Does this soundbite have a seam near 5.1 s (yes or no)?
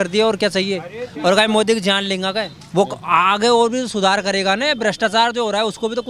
no